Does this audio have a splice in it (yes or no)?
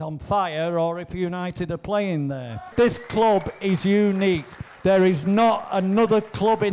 yes